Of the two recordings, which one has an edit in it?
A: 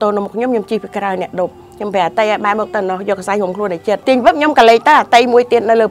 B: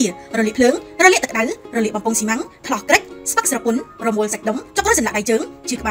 A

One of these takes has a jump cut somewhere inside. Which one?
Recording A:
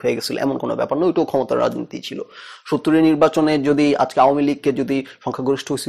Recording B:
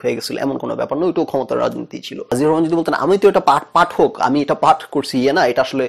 B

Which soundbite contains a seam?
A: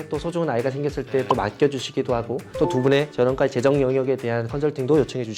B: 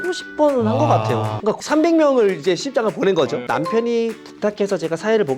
B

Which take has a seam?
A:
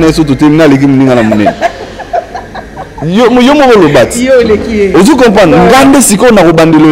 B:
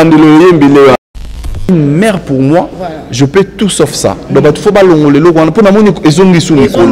B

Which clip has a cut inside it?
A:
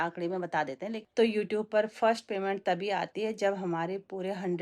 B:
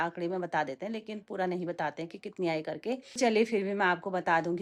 A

